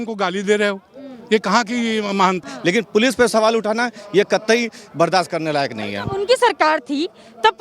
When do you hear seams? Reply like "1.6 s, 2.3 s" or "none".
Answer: 2.5 s